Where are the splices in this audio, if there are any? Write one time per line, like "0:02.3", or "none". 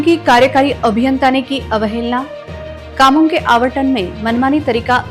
none